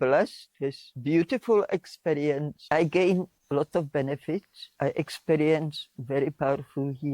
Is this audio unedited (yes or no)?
no